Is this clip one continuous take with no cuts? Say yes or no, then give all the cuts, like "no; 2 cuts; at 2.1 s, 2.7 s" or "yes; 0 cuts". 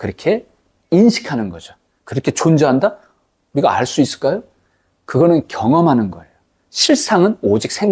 yes; 0 cuts